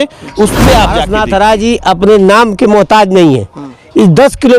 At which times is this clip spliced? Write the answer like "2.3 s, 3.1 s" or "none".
1.1 s